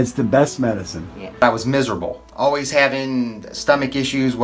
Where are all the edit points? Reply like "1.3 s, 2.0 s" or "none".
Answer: 1.4 s